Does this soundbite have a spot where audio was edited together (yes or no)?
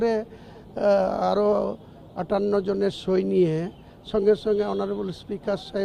no